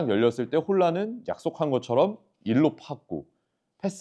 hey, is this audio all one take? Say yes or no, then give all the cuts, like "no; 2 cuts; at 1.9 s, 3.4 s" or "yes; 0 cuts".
yes; 0 cuts